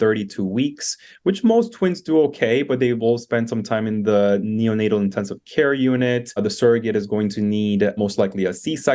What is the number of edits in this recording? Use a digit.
2